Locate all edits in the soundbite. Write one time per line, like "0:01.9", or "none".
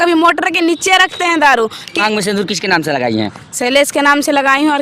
0:02.0